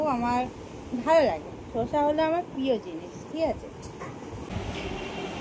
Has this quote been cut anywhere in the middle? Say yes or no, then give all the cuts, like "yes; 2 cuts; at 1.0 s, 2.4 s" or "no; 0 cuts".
yes; 1 cut; at 4.5 s